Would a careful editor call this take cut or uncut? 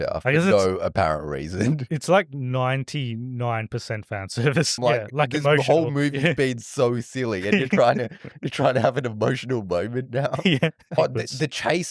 cut